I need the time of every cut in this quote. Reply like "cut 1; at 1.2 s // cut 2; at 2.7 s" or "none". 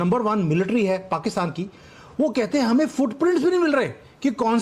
none